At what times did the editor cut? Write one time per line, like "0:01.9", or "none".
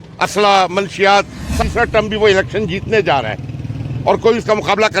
0:01.6